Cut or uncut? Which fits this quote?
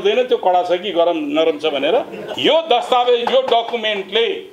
cut